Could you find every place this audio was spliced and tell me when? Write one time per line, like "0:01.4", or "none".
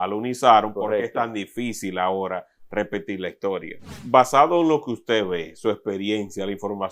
0:04.0